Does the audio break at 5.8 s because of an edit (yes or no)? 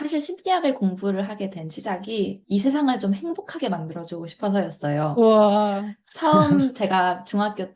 no